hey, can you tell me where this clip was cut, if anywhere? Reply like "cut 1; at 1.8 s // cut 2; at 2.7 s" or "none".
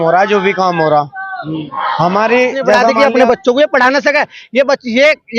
cut 1; at 2.9 s